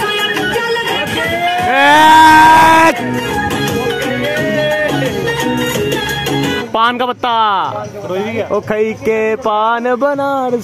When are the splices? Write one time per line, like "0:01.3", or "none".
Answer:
0:00.9
0:03.3
0:06.6
0:08.5